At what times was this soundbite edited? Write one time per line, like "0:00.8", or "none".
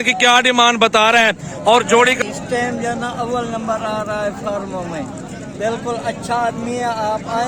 0:02.2